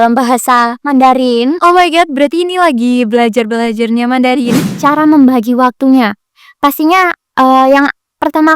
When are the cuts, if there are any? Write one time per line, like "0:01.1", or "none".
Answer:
0:04.8

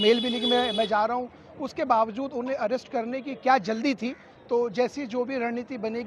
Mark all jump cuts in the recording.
0:04.3

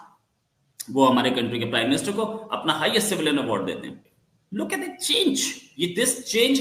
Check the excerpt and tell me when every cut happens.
0:04.0

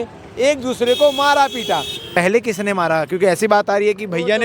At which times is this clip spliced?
0:02.0

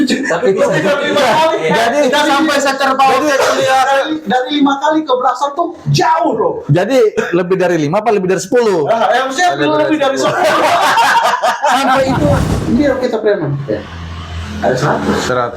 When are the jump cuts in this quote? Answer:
0:12.4

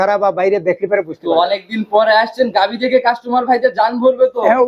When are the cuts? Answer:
none

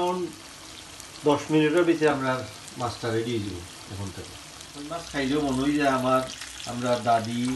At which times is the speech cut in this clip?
0:05.0

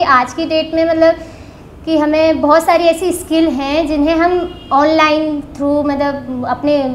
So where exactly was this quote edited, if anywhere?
none

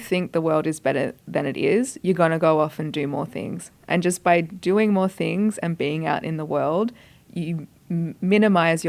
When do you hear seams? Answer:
none

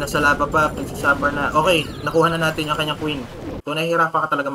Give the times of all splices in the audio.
0:03.5

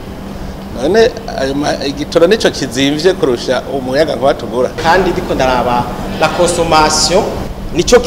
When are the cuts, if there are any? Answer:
0:04.8

